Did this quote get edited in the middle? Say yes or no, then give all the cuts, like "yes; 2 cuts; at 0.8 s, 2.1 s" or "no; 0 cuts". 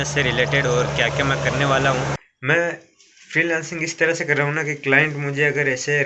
yes; 1 cut; at 2.2 s